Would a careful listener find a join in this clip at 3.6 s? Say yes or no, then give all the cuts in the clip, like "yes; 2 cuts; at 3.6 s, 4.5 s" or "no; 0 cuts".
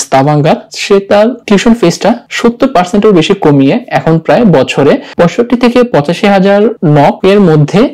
no; 4 cuts; at 1.1 s, 2.3 s, 5.1 s, 7.1 s